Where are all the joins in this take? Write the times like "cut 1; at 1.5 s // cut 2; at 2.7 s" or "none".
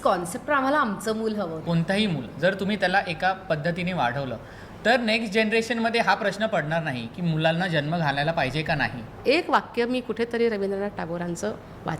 cut 1; at 1.6 s // cut 2; at 9.1 s